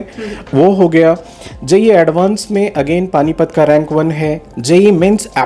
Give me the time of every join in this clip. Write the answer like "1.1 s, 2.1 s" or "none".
none